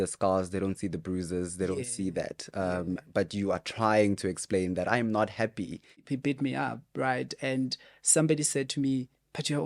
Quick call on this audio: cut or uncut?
cut